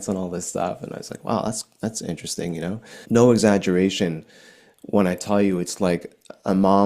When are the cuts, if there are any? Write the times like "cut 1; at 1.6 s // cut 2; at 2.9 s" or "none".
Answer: cut 1; at 2.9 s